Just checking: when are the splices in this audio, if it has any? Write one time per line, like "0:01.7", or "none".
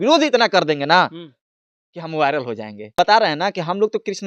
0:02.9